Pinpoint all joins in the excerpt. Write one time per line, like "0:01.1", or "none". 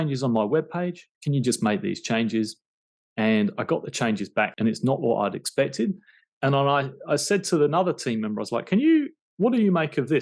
0:01.1
0:04.5